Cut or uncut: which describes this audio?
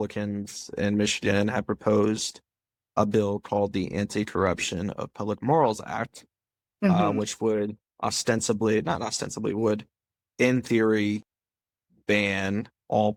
uncut